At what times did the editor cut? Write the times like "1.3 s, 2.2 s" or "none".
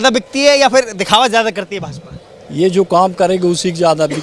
none